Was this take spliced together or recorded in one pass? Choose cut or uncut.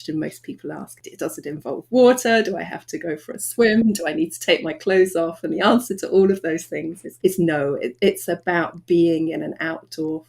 cut